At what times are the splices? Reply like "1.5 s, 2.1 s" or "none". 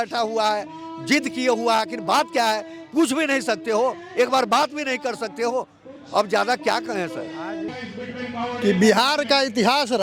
7.8 s

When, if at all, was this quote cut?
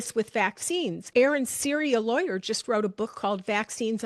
1.0 s

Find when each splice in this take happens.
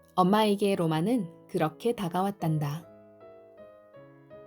2.8 s

